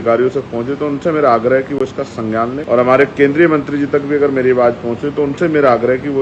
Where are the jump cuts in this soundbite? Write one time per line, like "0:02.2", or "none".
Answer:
0:02.6